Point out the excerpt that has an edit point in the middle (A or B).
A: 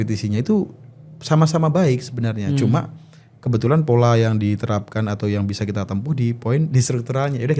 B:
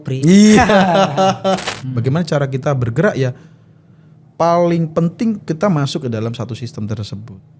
B